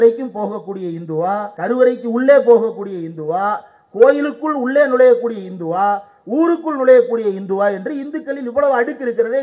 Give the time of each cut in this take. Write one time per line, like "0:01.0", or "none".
0:01.5